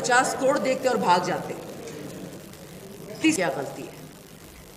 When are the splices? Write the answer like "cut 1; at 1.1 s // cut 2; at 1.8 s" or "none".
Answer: cut 1; at 3.4 s